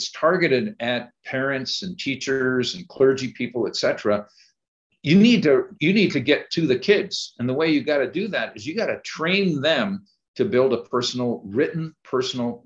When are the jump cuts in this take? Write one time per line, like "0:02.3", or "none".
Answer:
none